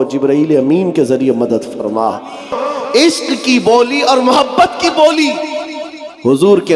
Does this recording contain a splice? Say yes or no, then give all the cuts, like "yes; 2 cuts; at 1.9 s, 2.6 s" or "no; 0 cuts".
yes; 1 cut; at 2.5 s